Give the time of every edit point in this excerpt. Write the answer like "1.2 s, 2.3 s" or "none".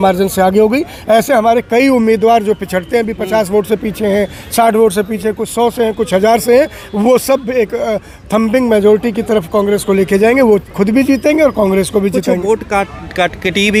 none